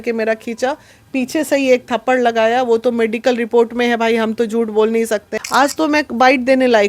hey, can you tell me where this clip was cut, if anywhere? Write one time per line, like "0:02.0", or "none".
0:05.3

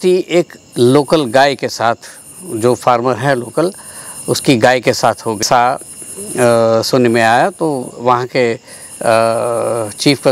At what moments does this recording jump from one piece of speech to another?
0:05.4

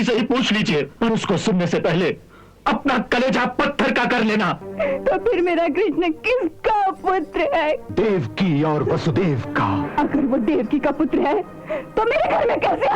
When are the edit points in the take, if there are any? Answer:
0:00.9
0:04.6
0:07.8
0:09.8

